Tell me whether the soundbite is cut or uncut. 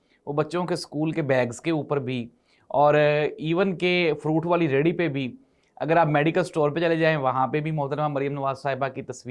uncut